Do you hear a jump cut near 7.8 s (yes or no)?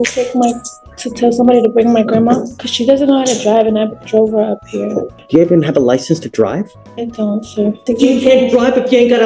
yes